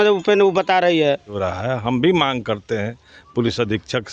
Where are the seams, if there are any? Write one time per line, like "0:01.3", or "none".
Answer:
0:01.4